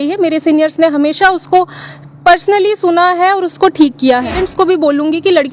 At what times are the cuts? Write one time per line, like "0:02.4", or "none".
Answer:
0:04.4